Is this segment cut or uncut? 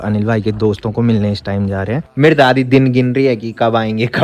cut